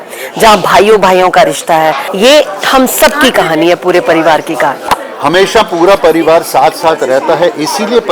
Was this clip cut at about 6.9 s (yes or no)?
no